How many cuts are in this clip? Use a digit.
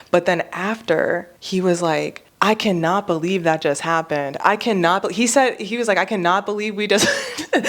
2